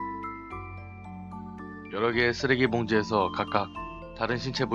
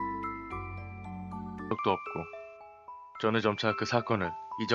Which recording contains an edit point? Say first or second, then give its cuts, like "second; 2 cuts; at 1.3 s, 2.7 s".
first; 1 cut; at 1.6 s